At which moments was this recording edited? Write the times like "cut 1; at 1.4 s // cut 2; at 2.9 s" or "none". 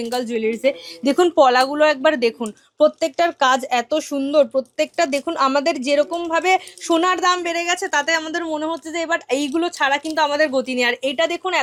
none